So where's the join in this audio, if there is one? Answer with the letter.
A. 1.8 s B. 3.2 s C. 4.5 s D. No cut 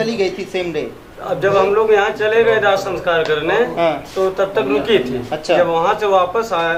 D